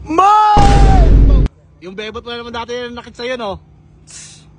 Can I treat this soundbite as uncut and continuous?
no; 1 cut; at 1.5 s

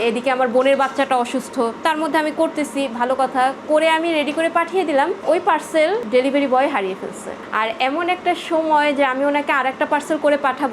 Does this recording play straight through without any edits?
yes; 0 cuts

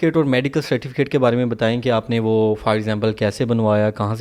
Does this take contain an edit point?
no; 0 cuts

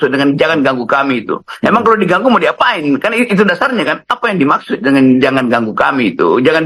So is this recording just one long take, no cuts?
no; 1 cut; at 4.0 s

